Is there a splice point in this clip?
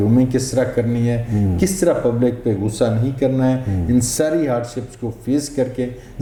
no; 0 cuts

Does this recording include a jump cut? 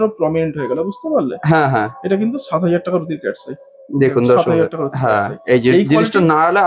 no; 0 cuts

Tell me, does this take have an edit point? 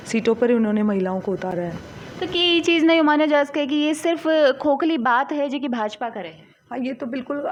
no; 0 cuts

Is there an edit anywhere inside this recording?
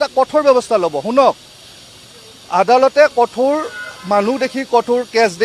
no; 0 cuts

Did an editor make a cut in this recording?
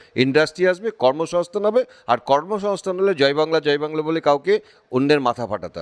no; 0 cuts

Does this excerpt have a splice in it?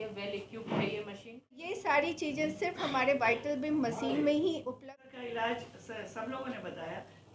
yes; 2 cuts; at 1.7 s, 4.7 s

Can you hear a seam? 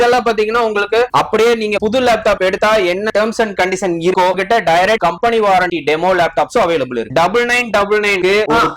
yes; 2 cuts; at 4.4 s, 7.1 s

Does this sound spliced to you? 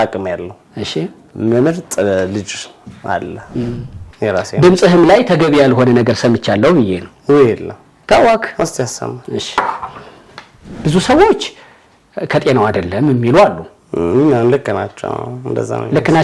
yes; 2 cuts; at 3.4 s, 10.6 s

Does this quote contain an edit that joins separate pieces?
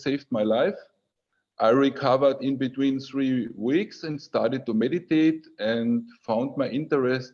no; 0 cuts

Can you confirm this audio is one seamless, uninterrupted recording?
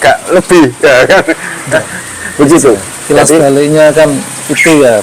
yes; 0 cuts

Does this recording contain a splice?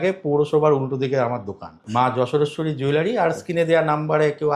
yes; 1 cut; at 1.8 s

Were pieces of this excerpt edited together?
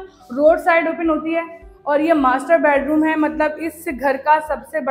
no; 0 cuts

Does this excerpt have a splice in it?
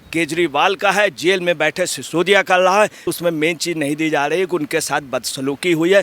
yes; 1 cut; at 3.0 s

